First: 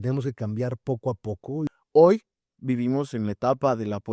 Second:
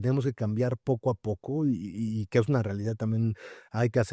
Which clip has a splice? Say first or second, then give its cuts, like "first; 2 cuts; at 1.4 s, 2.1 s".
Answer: first; 1 cut; at 1.7 s